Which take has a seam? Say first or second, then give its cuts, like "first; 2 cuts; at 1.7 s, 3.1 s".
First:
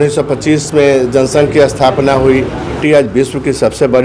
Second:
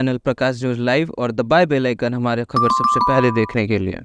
first; 1 cut; at 2.8 s